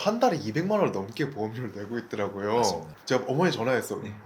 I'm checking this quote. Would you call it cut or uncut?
cut